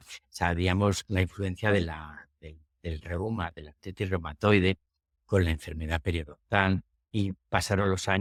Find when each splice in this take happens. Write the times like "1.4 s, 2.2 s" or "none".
none

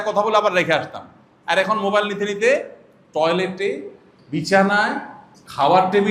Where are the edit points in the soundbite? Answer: none

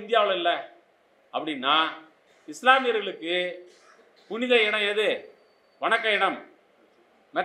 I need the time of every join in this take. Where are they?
none

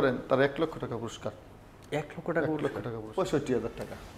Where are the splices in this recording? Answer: 3.0 s

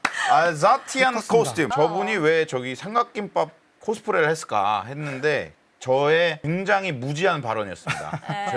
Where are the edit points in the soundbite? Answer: 1.7 s

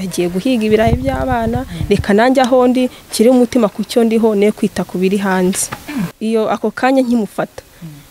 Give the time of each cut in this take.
6.1 s

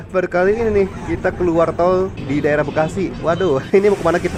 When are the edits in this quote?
none

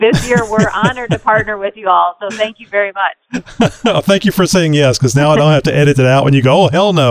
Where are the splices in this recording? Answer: none

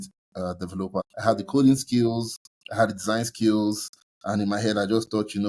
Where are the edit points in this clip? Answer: 1.1 s

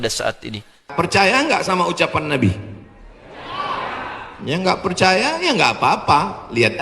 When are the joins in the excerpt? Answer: 0.9 s

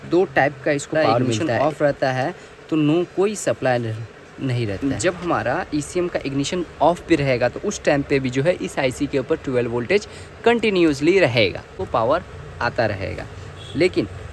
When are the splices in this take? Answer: 1.4 s, 4.8 s, 11.8 s

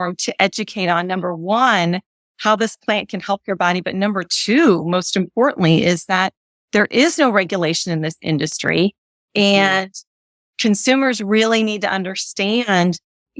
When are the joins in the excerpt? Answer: none

